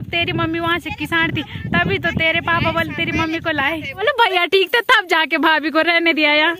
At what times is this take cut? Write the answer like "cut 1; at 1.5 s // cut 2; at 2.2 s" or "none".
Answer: cut 1; at 4.0 s